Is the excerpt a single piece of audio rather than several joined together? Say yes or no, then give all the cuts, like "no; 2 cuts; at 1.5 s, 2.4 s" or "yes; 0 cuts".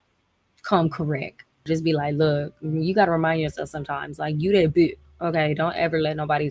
no; 1 cut; at 1.6 s